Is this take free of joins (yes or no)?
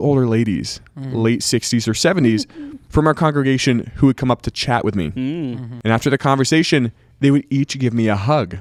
yes